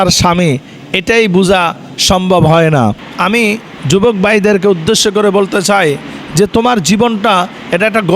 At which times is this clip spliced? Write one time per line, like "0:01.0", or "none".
0:03.1